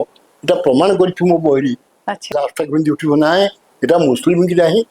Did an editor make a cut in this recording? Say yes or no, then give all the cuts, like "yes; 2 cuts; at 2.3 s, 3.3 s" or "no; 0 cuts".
yes; 1 cut; at 2.3 s